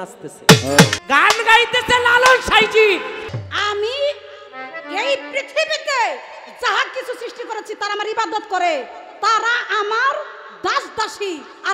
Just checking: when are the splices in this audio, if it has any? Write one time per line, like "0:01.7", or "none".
0:01.0
0:03.4